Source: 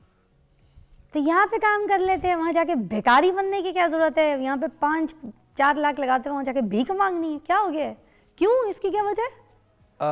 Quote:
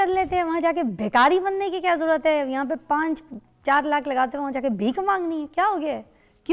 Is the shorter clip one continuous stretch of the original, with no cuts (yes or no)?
yes